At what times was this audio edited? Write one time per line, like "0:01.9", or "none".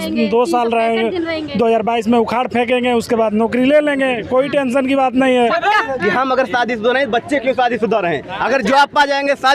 0:05.7